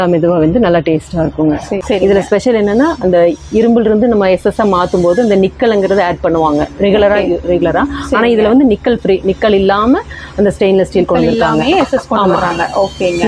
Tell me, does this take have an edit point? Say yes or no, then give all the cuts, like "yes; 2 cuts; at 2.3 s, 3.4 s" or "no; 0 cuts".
yes; 1 cut; at 1.8 s